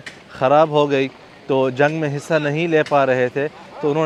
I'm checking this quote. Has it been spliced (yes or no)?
no